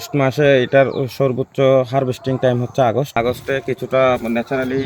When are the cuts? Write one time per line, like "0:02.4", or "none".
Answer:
0:03.1